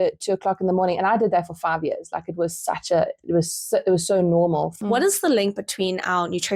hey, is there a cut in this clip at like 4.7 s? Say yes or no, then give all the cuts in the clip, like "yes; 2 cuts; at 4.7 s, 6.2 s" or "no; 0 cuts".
yes; 1 cut; at 4.7 s